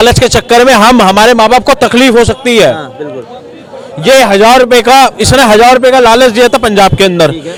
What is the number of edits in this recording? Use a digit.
0